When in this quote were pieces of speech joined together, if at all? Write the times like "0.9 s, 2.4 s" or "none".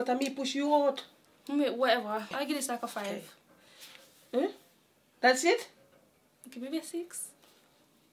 none